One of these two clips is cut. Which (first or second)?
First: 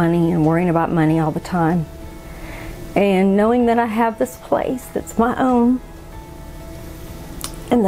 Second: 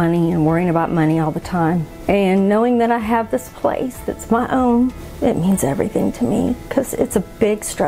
second